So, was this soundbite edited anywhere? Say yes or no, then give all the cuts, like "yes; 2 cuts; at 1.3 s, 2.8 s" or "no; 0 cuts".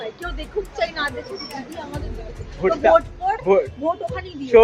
no; 0 cuts